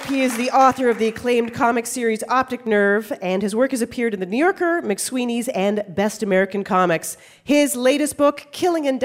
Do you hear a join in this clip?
no; 0 cuts

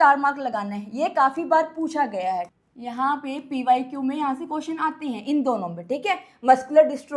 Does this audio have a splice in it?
yes; 1 cut; at 2.5 s

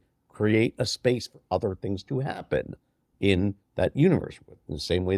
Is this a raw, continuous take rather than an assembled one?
yes; 0 cuts

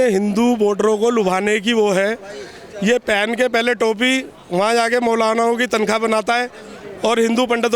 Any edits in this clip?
no; 0 cuts

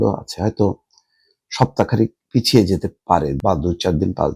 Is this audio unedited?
no; 1 cut; at 3.4 s

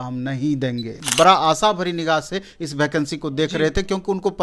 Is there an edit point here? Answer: yes; 1 cut; at 1.0 s

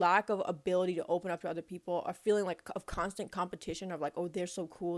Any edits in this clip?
no; 0 cuts

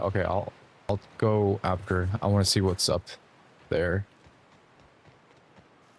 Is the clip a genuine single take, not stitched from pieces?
yes; 0 cuts

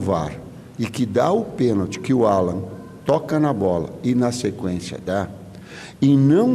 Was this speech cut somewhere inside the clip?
no; 0 cuts

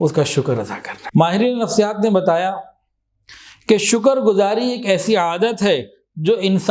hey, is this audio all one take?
no; 1 cut; at 0.9 s

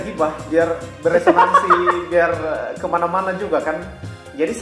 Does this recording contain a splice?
no; 0 cuts

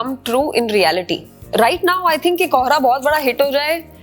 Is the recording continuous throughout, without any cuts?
no; 1 cut; at 1.4 s

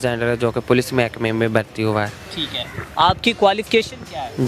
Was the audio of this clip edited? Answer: no; 0 cuts

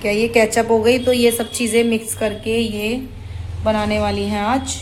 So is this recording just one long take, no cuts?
yes; 0 cuts

